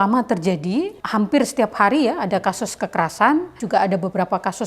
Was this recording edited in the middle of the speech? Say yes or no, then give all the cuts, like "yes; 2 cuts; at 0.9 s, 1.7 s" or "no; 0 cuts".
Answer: yes; 2 cuts; at 1.0 s, 3.6 s